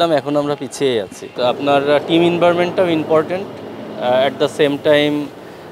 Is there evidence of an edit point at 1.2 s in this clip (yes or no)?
yes